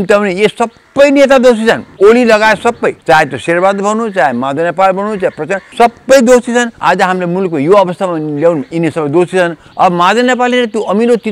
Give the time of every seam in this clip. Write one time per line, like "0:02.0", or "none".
0:01.9
0:03.0
0:05.6
0:06.7
0:09.6